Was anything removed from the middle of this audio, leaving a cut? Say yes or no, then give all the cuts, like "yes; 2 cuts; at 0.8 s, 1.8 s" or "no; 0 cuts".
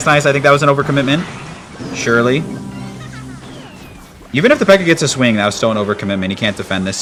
no; 0 cuts